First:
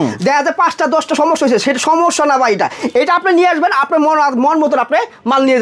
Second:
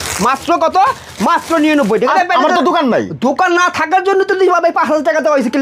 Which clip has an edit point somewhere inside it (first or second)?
second